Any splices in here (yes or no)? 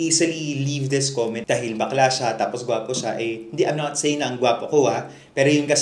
yes